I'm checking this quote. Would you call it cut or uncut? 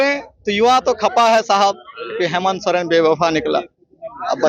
uncut